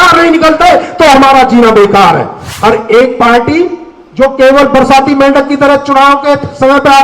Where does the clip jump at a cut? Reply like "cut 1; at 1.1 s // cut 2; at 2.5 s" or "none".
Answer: cut 1; at 2.4 s